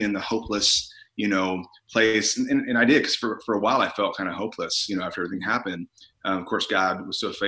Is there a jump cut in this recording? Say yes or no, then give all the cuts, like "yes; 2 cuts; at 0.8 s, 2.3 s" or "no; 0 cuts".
no; 0 cuts